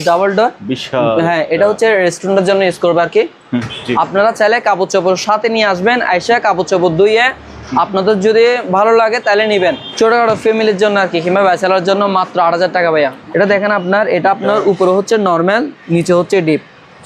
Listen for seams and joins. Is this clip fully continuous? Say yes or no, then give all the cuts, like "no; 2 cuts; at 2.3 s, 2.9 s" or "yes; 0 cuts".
no; 3 cuts; at 3.7 s, 9.9 s, 13.2 s